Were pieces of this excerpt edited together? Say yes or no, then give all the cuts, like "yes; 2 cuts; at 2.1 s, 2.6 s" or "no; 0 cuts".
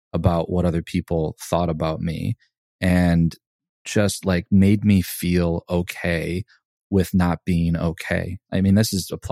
yes; 2 cuts; at 3.7 s, 8.4 s